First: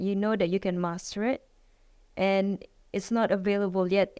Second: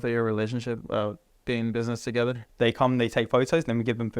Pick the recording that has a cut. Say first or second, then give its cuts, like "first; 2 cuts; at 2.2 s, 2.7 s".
second; 1 cut; at 2.4 s